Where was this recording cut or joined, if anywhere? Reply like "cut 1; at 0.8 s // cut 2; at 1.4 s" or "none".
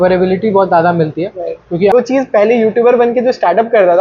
cut 1; at 1.9 s